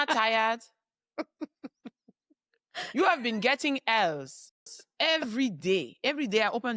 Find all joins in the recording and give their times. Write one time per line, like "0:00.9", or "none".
0:04.8